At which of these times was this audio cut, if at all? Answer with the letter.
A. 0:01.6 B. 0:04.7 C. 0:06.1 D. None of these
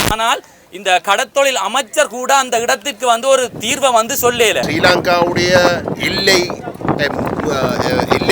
B